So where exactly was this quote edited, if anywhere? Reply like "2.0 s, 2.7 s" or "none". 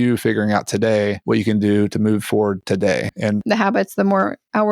3.4 s